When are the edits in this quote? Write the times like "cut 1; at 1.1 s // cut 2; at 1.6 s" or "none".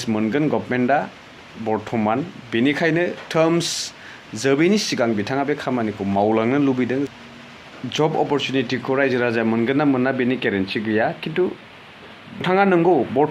cut 1; at 7.1 s // cut 2; at 12.4 s